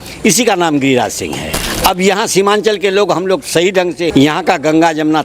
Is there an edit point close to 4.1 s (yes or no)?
yes